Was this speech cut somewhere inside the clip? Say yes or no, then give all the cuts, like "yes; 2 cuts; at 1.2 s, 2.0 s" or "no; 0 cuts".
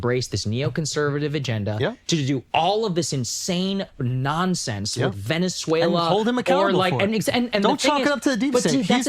no; 0 cuts